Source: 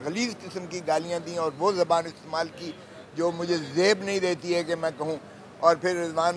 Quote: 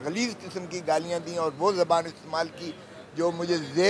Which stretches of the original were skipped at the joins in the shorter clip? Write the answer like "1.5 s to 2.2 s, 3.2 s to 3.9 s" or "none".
none